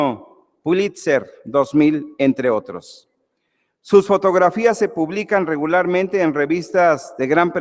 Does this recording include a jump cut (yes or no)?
yes